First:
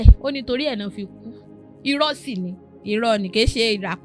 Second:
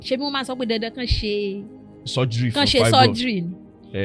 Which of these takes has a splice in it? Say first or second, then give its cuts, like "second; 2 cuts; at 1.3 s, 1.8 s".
first; 1 cut; at 2.7 s